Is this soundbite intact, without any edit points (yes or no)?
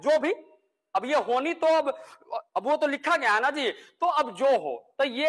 yes